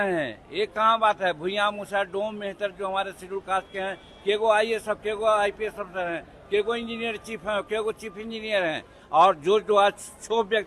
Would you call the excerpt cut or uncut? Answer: uncut